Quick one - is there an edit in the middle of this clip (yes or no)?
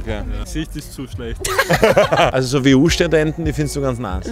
yes